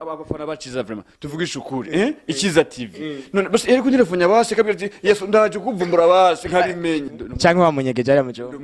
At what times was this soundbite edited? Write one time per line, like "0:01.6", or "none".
0:07.0